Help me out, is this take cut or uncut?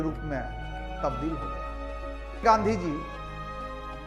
cut